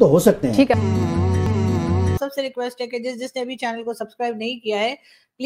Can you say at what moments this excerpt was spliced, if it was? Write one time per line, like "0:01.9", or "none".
0:02.2

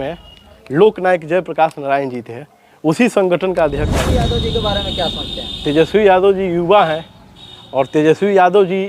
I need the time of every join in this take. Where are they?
0:04.1

